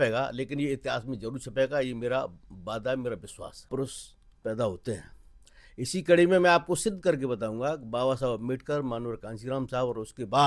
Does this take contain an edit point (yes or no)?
yes